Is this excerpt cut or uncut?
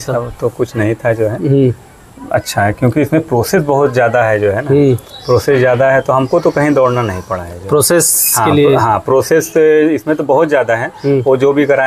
uncut